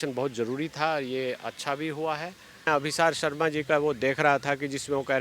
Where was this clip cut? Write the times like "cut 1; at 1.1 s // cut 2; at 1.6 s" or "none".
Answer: cut 1; at 2.7 s